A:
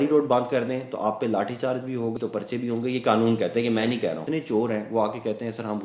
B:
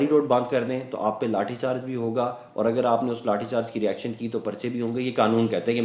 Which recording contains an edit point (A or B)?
A